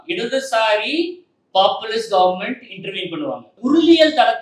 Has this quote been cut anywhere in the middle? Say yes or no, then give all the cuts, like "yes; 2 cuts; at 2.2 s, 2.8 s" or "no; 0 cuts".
yes; 1 cut; at 3.5 s